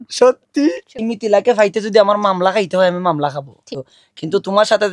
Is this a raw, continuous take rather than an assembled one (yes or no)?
no